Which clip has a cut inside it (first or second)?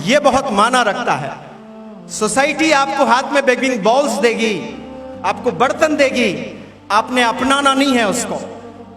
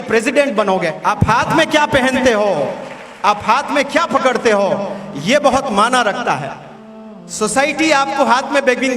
second